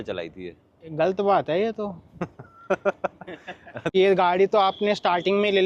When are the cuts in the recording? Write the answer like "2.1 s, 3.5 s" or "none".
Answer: 4.0 s